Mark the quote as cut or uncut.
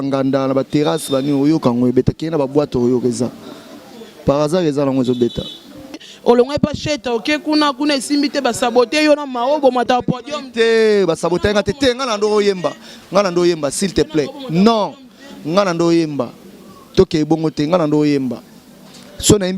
cut